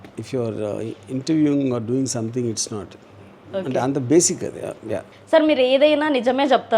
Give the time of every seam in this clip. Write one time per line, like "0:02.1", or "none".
0:05.0

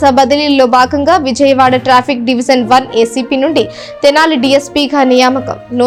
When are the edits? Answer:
none

